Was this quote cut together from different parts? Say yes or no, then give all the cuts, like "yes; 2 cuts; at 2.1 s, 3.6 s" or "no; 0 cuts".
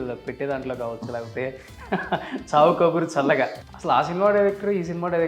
yes; 1 cut; at 3.6 s